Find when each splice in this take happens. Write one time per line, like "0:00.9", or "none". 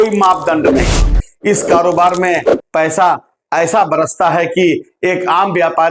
0:01.2